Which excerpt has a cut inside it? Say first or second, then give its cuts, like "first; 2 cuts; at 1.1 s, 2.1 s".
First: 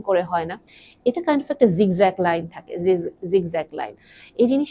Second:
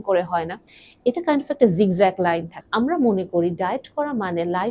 second; 1 cut; at 2.6 s